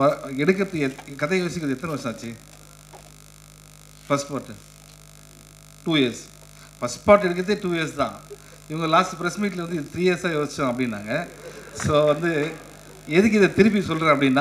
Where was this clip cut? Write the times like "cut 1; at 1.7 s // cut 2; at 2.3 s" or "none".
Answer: none